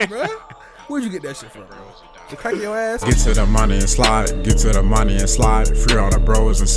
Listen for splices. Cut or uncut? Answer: cut